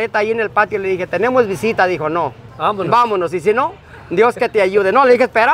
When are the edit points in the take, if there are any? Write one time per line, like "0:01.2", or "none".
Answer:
0:02.4

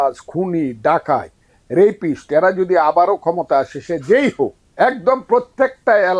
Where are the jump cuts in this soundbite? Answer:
0:04.6

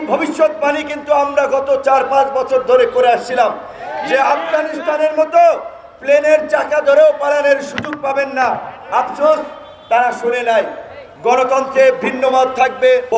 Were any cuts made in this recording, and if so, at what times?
none

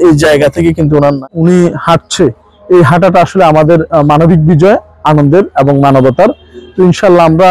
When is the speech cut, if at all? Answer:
0:01.2

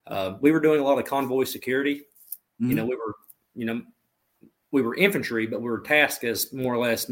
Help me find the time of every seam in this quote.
none

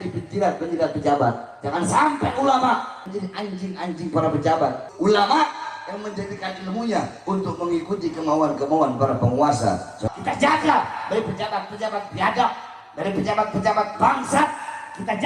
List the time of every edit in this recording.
0:04.9
0:10.0

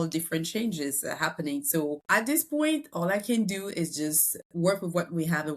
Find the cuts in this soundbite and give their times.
0:02.0

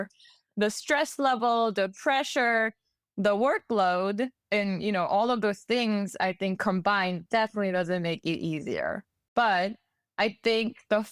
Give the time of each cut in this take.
none

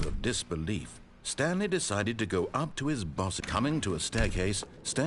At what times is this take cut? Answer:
0:03.4

